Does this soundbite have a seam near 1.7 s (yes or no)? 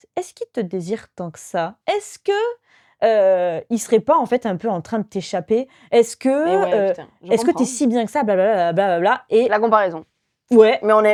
no